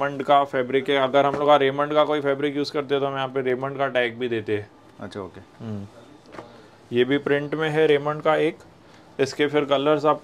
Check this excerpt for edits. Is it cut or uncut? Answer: uncut